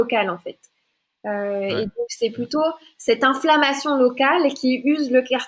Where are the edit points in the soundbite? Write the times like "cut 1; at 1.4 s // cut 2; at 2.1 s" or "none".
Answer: none